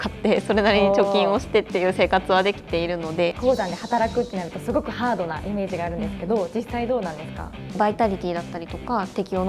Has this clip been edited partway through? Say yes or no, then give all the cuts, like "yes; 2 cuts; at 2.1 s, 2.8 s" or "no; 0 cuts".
yes; 2 cuts; at 3.4 s, 7.7 s